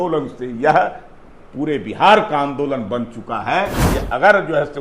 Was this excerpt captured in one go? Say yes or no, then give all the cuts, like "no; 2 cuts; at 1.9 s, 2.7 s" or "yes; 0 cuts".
no; 1 cut; at 3.8 s